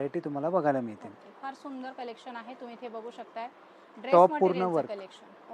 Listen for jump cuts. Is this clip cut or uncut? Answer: uncut